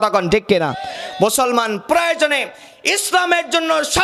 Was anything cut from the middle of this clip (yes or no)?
no